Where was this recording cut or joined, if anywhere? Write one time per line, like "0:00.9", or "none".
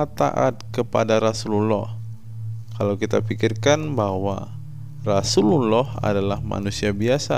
none